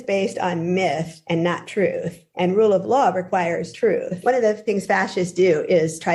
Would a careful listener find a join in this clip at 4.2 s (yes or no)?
yes